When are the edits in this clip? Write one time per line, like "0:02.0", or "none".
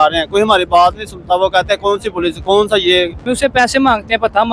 0:03.2